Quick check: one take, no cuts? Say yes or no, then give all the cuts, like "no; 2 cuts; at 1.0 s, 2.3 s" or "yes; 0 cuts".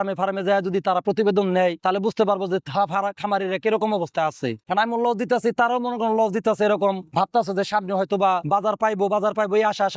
yes; 0 cuts